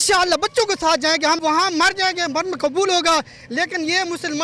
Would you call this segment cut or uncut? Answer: cut